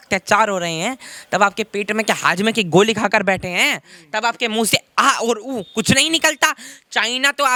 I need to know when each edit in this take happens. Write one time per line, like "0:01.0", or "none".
none